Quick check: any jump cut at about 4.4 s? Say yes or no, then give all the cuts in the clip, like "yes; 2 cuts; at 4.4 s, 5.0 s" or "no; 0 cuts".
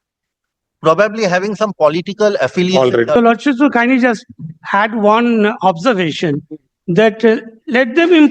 no; 1 cut; at 3.2 s